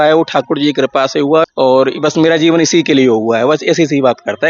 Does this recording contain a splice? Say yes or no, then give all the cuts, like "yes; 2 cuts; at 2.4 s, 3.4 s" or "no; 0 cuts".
yes; 1 cut; at 1.4 s